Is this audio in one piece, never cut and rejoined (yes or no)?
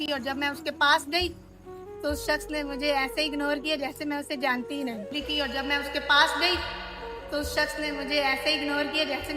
no